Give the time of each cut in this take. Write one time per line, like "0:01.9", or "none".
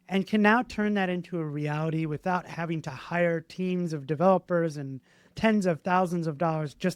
none